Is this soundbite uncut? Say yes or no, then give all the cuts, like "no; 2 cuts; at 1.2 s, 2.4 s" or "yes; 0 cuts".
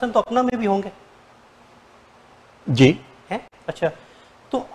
yes; 0 cuts